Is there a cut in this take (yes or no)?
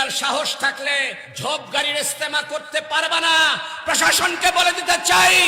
yes